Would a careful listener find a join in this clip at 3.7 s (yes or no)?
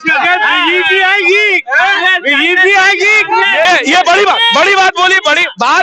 yes